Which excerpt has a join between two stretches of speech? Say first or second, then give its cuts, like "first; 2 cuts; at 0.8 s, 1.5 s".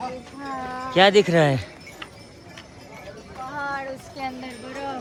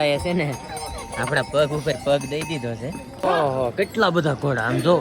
second; 1 cut; at 3.1 s